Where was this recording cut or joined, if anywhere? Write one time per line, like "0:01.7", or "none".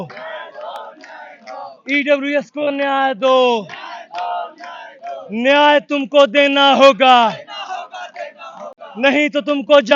none